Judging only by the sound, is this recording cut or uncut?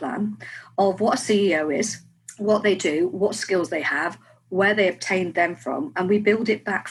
uncut